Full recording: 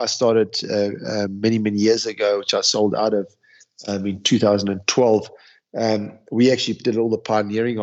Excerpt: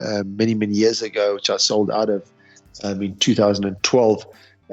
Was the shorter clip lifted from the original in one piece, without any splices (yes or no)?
yes